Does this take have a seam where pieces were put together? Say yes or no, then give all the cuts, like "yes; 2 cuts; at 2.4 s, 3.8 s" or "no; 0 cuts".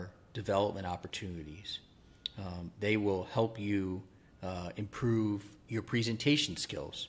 no; 0 cuts